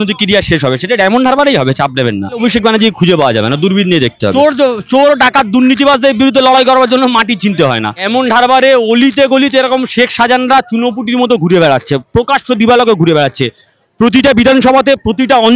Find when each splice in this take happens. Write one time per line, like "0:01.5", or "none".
0:02.4
0:04.2
0:08.0